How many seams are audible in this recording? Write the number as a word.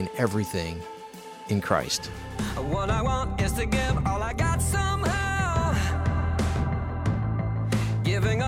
one